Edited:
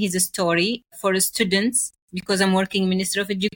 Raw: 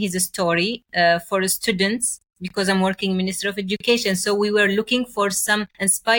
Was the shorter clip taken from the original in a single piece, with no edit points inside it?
no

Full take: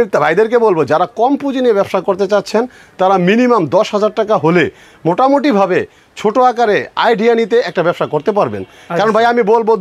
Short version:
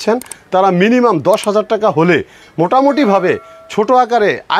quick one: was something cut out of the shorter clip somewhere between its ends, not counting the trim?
no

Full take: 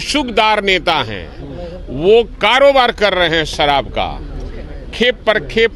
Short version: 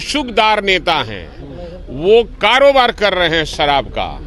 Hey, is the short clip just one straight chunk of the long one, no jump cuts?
yes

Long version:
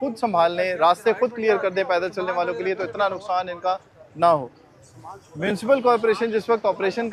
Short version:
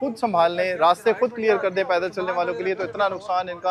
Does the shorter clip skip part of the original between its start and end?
no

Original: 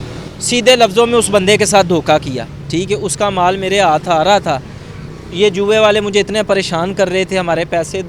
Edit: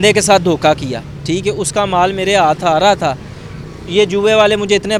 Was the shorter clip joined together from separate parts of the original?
no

